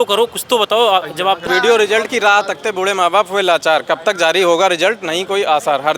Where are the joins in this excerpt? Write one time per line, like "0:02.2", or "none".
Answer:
0:01.4